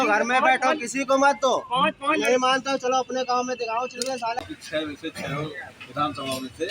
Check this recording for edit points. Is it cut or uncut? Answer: cut